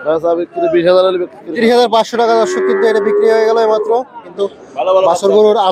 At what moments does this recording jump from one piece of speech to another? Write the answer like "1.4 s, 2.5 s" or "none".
1.6 s, 4.2 s